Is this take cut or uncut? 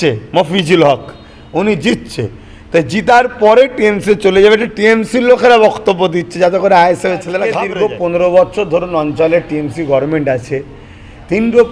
cut